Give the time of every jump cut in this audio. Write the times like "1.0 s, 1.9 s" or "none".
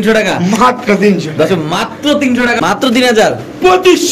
2.6 s